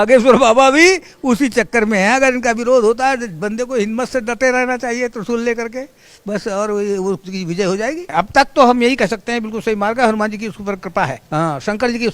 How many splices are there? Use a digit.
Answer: 2